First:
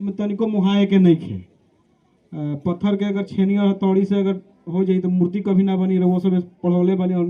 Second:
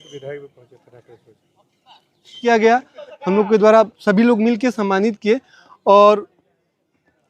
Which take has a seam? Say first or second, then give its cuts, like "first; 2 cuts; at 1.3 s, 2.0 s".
second; 1 cut; at 2.4 s